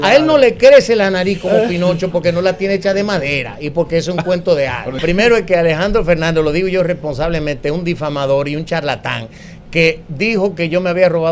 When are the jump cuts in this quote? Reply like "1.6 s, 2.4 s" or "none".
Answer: 5.0 s